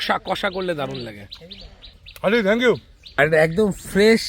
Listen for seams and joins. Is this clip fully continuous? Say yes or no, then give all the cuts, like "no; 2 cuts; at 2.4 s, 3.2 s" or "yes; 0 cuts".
no; 1 cut; at 3.0 s